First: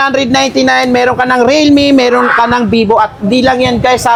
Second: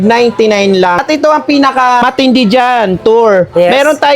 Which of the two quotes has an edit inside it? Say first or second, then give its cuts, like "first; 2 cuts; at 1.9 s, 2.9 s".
second; 2 cuts; at 1.0 s, 2.0 s